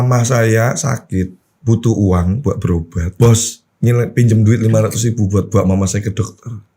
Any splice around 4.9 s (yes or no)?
no